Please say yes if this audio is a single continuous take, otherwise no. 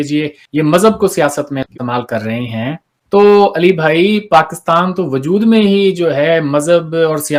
yes